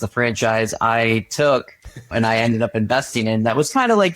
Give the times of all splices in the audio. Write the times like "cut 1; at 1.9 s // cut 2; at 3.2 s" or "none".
cut 1; at 2.1 s